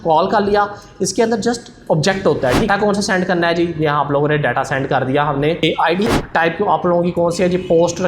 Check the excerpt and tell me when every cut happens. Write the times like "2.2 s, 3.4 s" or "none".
2.7 s, 6.1 s